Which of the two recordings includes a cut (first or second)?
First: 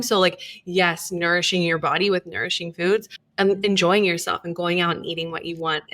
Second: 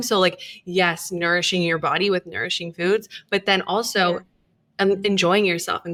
first